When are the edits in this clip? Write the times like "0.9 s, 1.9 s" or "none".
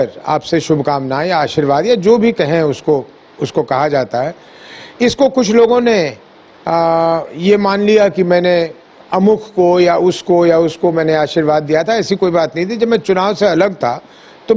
none